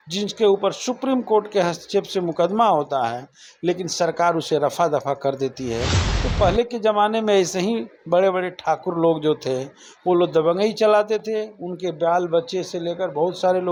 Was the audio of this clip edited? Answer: no; 0 cuts

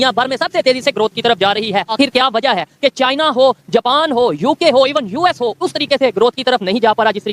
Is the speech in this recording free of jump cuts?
yes; 0 cuts

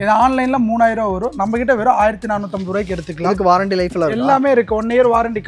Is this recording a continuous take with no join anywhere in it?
yes; 0 cuts

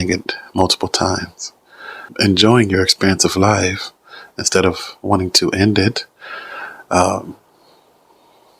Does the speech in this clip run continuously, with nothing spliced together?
no; 1 cut; at 2.1 s

